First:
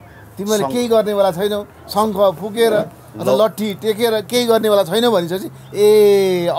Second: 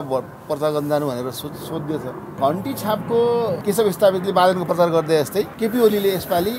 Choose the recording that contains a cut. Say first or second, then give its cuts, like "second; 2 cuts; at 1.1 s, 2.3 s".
second; 3 cuts; at 2.3 s, 3.6 s, 5.5 s